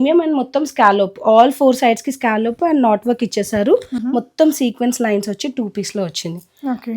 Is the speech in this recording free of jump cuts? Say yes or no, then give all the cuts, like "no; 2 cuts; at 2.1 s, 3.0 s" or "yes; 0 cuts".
no; 1 cut; at 4.0 s